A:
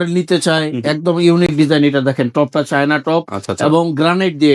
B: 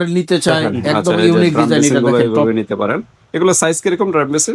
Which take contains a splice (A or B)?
B